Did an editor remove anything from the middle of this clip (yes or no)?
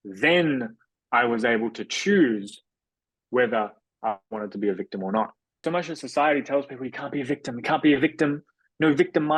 yes